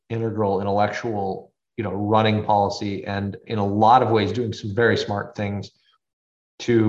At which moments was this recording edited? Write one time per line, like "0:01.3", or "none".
0:01.6
0:03.4